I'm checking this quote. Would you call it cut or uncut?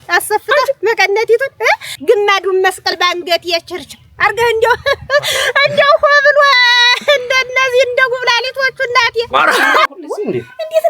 cut